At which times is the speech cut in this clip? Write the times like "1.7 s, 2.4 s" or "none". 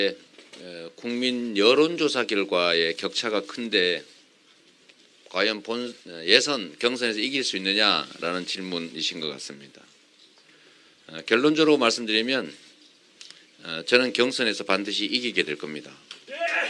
none